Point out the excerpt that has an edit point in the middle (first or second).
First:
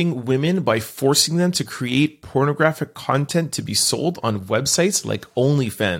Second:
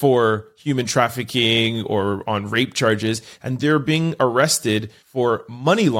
second